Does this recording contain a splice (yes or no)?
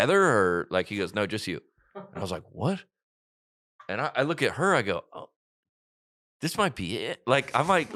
no